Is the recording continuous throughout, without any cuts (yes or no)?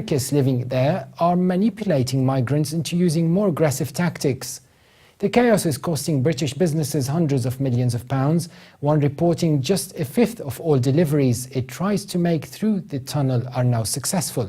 no